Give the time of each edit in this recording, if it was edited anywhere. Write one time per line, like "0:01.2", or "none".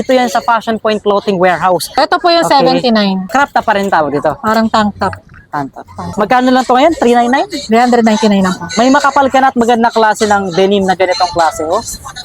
0:01.9
0:03.2
0:06.0

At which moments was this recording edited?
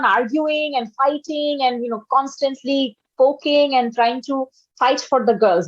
none

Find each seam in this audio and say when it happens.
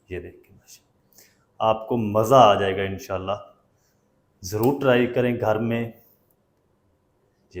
none

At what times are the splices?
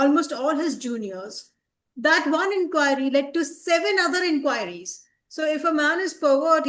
none

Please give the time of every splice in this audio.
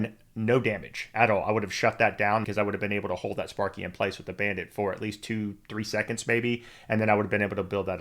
0:02.4

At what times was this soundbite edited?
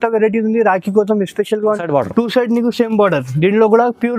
0:01.8

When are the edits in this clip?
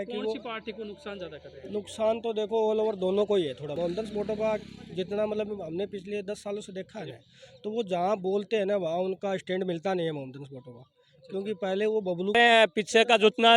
0:03.7
0:12.3

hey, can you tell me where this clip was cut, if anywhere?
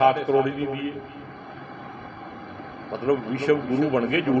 0:01.1

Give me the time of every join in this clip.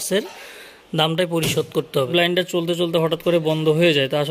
0:02.1

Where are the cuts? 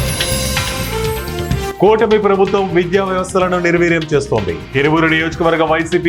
0:01.7

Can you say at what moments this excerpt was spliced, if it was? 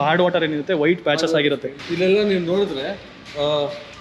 0:01.8

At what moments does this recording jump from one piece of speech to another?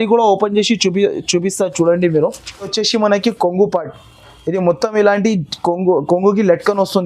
0:02.7

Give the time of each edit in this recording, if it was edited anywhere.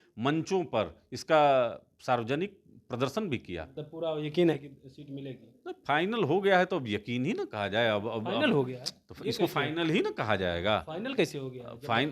0:03.8

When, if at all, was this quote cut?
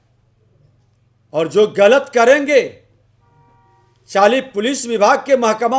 none

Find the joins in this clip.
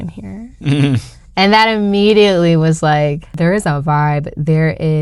0:03.3

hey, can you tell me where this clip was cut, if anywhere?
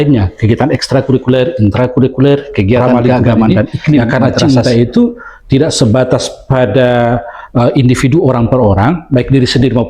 0:04.1

